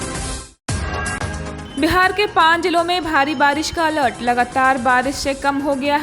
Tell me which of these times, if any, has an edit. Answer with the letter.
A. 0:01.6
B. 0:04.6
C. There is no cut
A